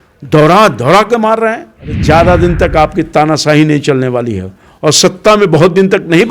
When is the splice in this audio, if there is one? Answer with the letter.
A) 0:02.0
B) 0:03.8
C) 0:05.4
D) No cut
A